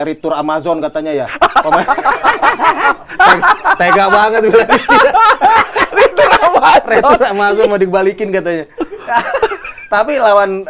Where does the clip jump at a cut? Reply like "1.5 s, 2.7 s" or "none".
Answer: none